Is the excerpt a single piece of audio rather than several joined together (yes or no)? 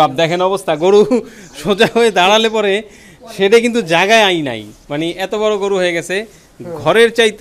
yes